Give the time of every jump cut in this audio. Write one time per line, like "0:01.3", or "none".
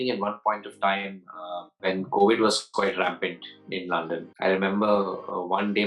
0:01.8
0:04.2